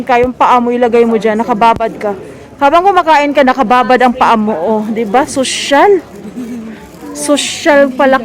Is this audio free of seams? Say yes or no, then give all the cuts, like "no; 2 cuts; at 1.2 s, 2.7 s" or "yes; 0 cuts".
yes; 0 cuts